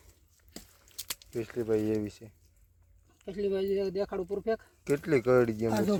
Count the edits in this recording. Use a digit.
0